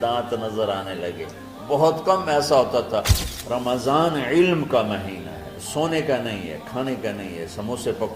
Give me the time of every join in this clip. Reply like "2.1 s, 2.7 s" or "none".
3.2 s